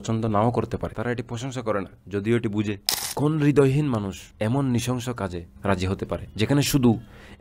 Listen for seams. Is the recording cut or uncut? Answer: cut